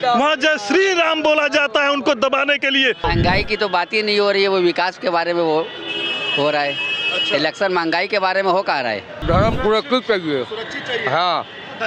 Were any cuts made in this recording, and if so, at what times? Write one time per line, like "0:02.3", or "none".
0:03.0
0:09.1